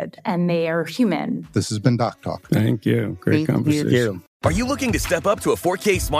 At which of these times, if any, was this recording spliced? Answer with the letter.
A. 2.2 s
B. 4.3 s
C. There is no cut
B